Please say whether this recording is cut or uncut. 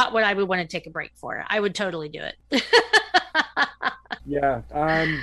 cut